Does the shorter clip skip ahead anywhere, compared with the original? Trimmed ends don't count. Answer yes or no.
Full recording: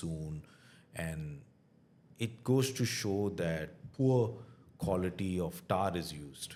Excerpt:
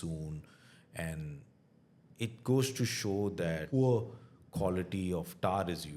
yes